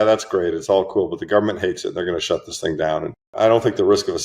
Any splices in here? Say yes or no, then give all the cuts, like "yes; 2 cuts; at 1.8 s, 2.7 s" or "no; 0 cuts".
yes; 1 cut; at 3.3 s